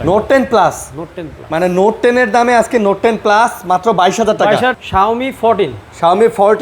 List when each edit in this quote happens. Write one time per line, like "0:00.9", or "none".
0:04.7